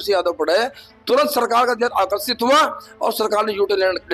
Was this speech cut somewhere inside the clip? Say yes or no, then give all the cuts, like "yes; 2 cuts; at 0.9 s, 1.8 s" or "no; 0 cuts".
no; 0 cuts